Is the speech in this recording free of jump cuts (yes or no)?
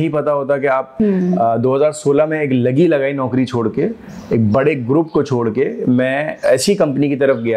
no